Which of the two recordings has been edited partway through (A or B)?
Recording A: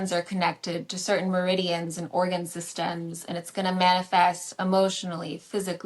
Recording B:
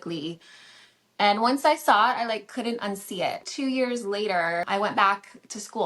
B